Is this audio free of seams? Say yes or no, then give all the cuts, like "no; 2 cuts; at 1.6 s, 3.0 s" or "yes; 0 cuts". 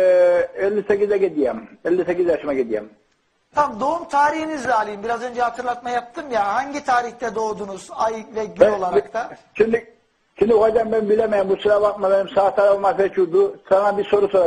yes; 0 cuts